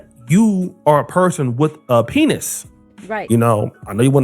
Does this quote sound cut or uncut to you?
cut